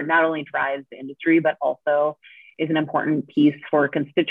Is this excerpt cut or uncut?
uncut